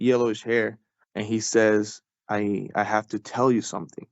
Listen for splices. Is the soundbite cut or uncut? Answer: cut